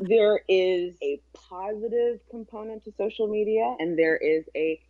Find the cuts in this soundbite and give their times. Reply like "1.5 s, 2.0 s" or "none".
1.0 s, 3.8 s